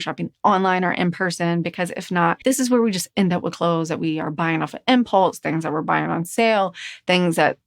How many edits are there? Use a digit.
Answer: 1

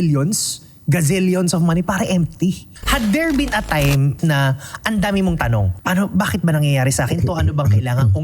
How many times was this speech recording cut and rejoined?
3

